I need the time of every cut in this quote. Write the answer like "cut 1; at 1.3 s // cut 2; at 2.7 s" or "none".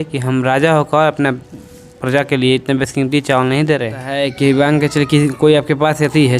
cut 1; at 4.0 s